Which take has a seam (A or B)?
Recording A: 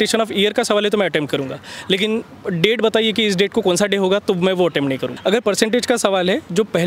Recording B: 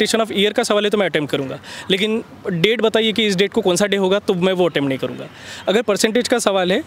A